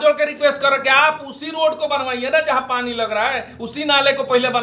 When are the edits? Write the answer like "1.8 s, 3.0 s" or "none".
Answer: none